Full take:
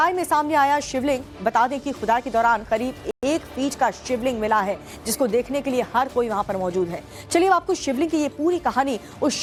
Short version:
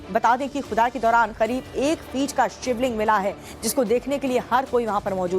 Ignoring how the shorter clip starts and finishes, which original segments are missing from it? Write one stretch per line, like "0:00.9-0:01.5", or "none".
0:03.1-0:03.2